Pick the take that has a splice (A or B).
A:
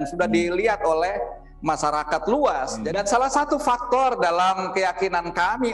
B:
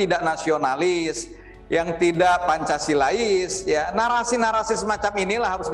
A